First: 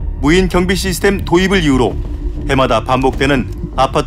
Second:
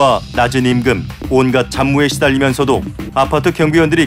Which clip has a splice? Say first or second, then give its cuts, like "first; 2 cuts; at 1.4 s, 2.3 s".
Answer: second; 2 cuts; at 1.1 s, 3.0 s